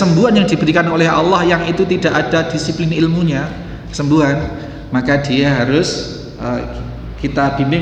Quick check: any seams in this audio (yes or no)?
no